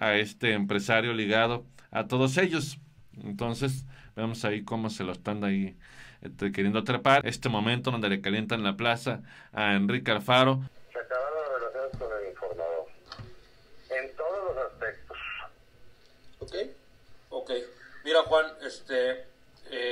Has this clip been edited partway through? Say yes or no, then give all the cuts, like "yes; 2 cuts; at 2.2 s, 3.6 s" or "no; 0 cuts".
yes; 2 cuts; at 7.2 s, 10.7 s